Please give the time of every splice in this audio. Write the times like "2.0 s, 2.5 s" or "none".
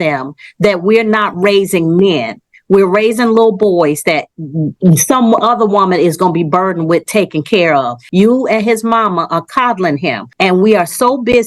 8.0 s, 10.2 s